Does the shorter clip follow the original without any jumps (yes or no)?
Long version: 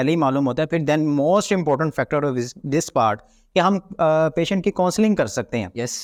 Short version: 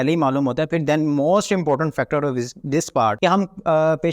no